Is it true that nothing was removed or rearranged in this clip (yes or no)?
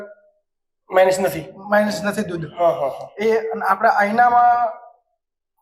yes